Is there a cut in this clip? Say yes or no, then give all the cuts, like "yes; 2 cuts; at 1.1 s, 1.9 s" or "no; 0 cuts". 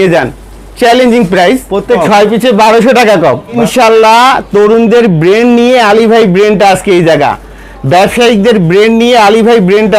yes; 2 cuts; at 2.0 s, 3.6 s